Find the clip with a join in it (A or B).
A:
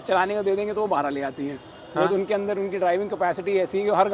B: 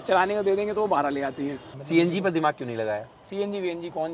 B